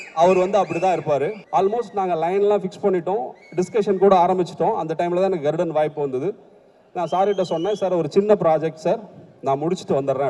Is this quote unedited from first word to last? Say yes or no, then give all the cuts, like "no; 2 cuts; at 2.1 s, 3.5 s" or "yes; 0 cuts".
no; 1 cut; at 1.4 s